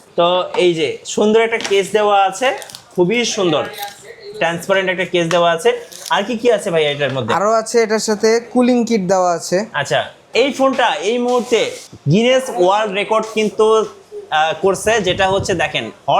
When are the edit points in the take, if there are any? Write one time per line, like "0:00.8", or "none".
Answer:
0:10.3